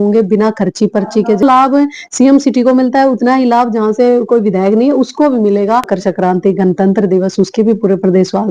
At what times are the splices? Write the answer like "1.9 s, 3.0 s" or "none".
1.4 s, 5.9 s